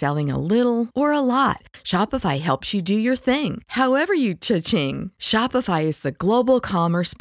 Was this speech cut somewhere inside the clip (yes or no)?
no